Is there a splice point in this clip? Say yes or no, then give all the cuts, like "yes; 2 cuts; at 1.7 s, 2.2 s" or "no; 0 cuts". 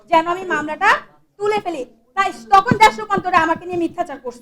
no; 0 cuts